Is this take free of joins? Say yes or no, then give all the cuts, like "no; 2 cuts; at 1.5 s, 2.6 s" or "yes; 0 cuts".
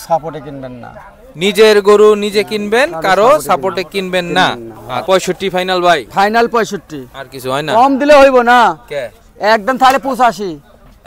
no; 1 cut; at 5.0 s